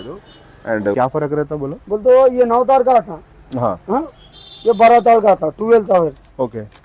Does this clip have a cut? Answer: yes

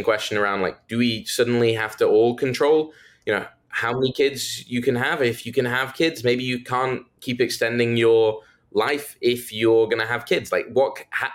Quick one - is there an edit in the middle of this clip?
no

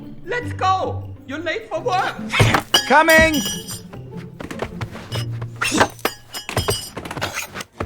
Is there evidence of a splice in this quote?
yes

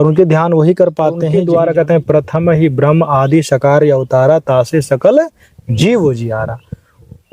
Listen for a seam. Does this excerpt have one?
yes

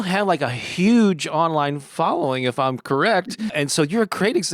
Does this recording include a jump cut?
yes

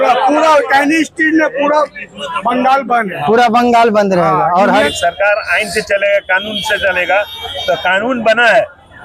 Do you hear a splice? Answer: yes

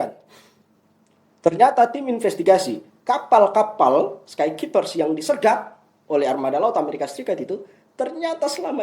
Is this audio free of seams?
yes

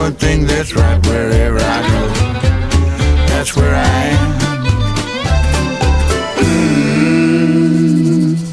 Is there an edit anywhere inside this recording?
no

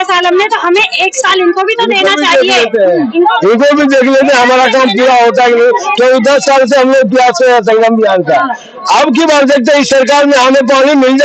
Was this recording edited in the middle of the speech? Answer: no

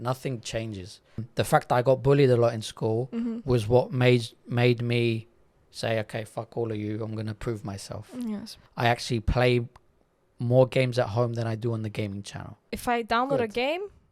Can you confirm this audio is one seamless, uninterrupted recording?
no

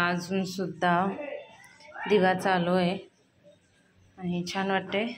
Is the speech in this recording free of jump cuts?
yes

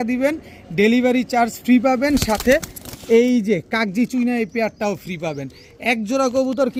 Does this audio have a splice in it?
no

